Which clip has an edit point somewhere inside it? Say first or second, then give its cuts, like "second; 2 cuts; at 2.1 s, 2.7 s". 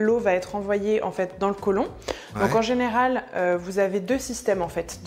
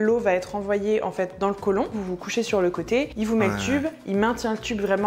second; 1 cut; at 2.0 s